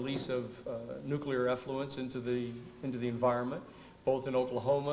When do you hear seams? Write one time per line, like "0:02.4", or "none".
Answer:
0:01.3